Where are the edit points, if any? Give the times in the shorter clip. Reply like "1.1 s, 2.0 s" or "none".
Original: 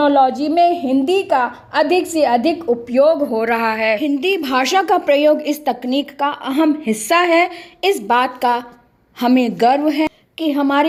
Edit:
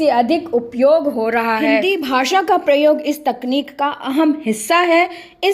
1.7 s